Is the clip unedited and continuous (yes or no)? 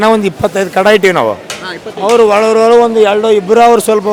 yes